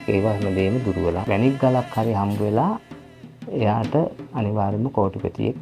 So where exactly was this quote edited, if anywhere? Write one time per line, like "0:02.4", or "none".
0:01.2